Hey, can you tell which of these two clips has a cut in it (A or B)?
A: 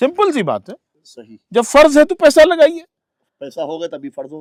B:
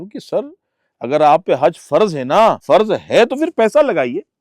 B